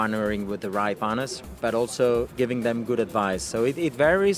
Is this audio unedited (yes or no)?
no